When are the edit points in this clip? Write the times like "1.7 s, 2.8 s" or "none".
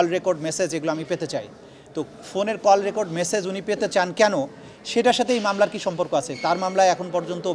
none